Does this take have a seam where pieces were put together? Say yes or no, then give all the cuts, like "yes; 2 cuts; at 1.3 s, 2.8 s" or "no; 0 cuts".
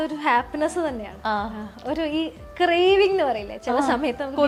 no; 0 cuts